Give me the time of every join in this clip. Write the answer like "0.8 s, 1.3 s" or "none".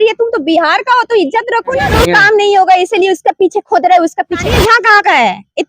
1.9 s, 4.4 s